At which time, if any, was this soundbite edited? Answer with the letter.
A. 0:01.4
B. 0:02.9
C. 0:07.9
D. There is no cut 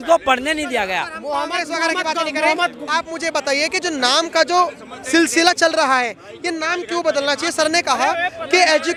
D